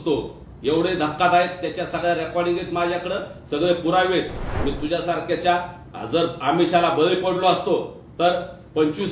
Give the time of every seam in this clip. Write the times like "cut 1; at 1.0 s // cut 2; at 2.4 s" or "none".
cut 1; at 4.4 s